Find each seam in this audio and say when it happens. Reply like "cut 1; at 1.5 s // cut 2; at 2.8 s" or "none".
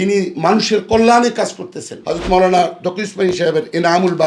cut 1; at 2.2 s